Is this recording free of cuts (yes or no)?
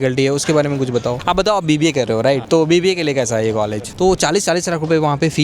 no